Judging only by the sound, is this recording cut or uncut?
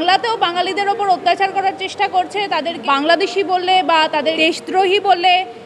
cut